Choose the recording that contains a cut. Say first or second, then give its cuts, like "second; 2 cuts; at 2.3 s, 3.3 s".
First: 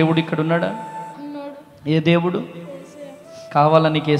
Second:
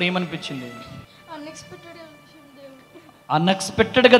second; 1 cut; at 1.1 s